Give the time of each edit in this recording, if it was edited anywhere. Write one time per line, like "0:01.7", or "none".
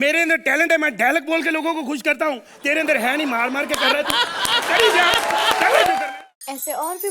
0:06.1

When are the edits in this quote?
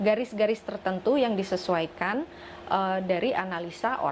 none

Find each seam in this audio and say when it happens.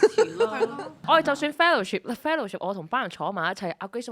0:00.9

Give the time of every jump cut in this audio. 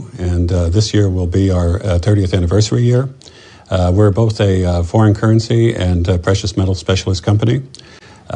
0:07.4

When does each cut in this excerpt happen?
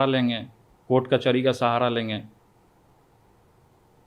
none

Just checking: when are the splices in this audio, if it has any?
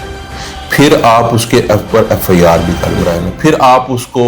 0:03.1

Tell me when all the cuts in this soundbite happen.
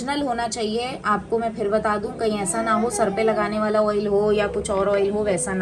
none

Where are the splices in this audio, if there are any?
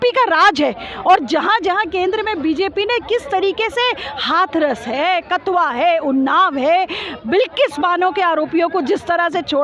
none

